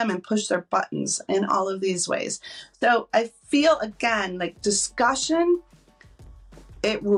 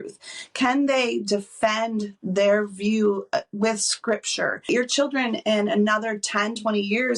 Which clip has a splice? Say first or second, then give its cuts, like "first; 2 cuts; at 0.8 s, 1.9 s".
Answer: second; 1 cut; at 4.7 s